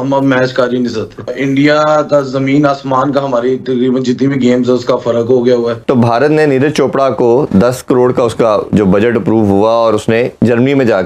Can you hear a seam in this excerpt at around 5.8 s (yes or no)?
yes